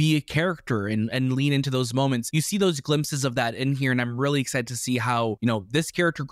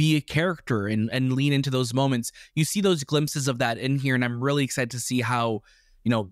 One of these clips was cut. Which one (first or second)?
first